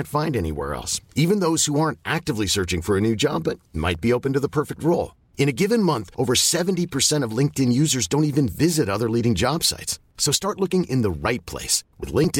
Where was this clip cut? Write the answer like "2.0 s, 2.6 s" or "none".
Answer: none